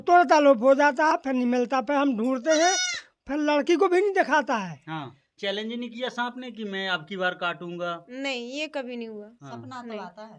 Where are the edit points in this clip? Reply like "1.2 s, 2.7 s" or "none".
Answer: 5.3 s